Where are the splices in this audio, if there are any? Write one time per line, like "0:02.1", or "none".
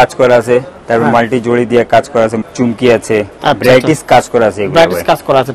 0:02.4
0:03.3